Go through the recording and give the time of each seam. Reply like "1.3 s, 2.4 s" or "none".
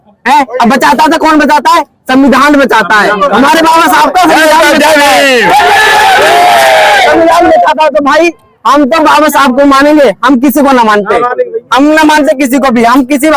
none